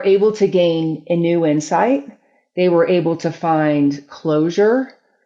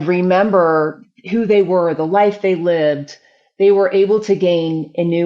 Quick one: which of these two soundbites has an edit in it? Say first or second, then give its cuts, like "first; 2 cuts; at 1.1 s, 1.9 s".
second; 1 cut; at 1.0 s